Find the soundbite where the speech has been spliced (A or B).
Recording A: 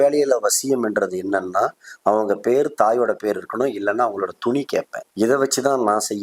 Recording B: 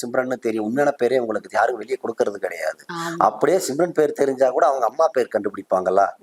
A